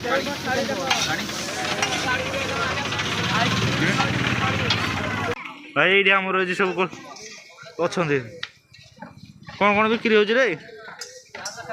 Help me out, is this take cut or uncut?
cut